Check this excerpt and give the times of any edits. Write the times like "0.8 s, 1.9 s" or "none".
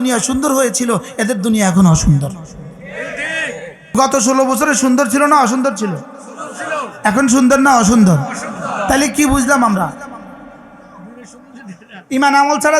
3.9 s